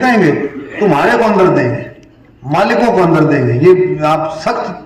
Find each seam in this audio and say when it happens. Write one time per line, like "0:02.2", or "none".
none